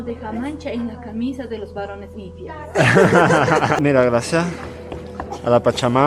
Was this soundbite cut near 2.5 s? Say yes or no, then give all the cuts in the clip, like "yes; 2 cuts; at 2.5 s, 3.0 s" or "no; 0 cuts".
no; 1 cut; at 3.8 s